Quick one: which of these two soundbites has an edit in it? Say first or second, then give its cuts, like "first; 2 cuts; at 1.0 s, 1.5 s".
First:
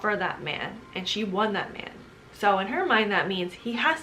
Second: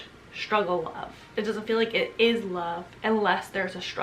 second; 1 cut; at 1.3 s